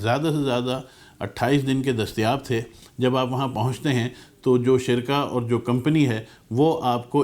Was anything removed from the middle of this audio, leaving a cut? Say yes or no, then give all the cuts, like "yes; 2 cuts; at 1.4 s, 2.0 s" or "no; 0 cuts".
yes; 1 cut; at 2.8 s